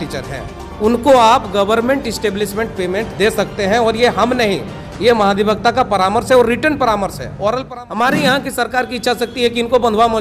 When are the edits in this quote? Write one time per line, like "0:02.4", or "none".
0:07.7